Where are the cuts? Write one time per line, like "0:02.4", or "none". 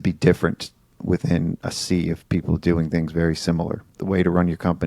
0:03.9